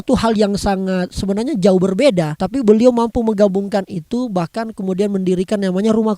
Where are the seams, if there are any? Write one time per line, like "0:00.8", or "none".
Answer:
0:02.4